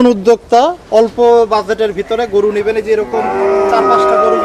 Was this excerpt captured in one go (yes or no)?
yes